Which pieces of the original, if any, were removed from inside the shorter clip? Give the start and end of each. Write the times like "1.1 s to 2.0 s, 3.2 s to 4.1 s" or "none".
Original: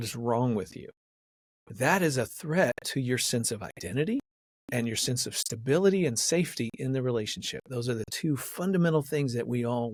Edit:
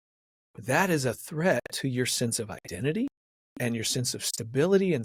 none